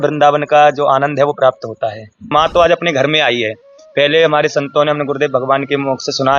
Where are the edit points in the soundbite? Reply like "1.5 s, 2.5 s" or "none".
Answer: 2.3 s